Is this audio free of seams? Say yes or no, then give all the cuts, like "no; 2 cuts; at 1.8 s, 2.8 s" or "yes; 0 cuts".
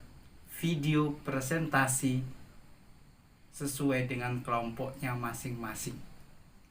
yes; 0 cuts